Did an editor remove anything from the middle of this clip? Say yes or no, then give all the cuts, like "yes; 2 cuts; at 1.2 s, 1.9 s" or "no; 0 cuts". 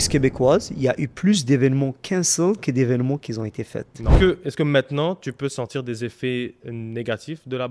yes; 1 cut; at 4.2 s